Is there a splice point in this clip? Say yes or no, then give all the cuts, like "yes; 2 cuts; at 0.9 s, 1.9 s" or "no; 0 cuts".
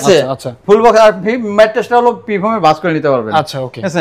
no; 0 cuts